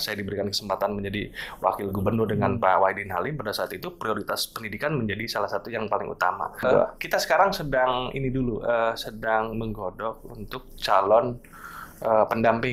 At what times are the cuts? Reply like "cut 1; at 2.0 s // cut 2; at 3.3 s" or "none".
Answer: cut 1; at 6.6 s